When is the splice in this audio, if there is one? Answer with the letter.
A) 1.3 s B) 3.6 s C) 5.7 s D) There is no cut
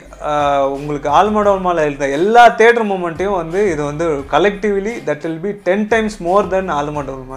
D